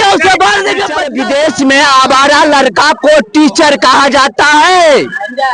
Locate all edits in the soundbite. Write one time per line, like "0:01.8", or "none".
0:01.0